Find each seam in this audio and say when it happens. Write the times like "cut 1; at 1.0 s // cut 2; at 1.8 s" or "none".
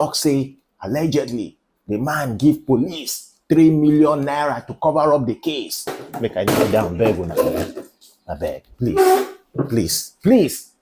cut 1; at 6.0 s